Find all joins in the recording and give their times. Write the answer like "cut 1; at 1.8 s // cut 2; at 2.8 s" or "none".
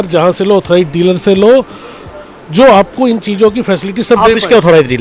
none